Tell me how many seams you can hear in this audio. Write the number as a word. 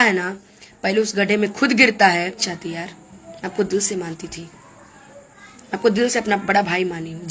one